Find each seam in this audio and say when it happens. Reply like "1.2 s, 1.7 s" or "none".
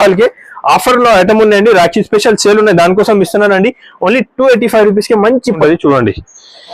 5.6 s